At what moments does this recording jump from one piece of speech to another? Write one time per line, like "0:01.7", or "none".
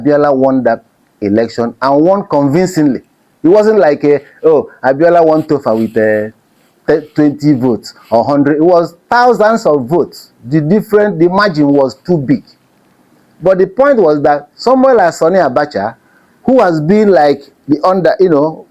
none